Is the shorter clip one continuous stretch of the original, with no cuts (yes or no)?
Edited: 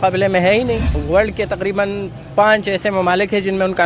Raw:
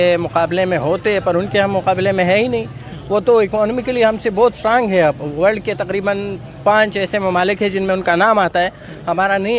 no